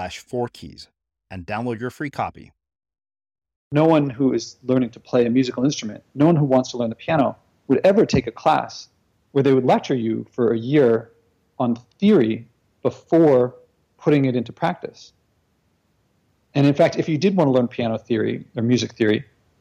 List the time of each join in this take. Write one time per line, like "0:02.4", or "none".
0:03.7